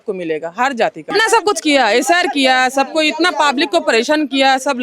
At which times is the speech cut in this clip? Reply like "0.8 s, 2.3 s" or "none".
1.1 s